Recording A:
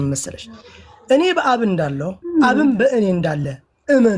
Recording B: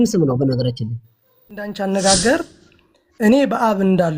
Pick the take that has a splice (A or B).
B